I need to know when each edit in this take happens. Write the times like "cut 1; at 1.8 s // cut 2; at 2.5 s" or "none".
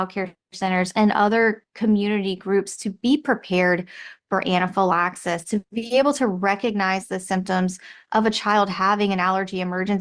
cut 1; at 5.7 s